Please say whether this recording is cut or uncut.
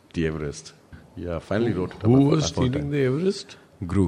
cut